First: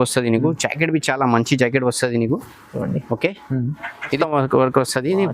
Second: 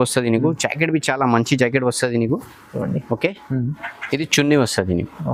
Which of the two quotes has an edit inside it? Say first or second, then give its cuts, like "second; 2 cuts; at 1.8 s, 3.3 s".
first; 1 cut; at 4.2 s